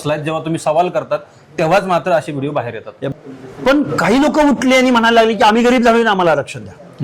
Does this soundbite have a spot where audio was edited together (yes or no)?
yes